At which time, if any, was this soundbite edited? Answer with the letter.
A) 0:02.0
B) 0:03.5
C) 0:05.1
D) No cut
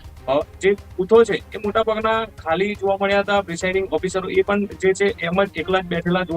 D